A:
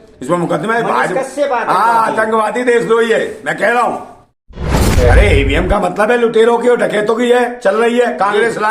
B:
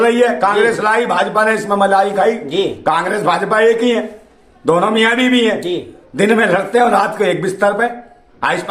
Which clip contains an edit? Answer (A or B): A